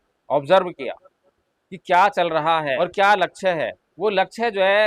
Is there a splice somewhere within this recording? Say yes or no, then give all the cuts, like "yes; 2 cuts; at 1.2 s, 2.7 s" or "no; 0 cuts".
yes; 2 cuts; at 2.8 s, 3.8 s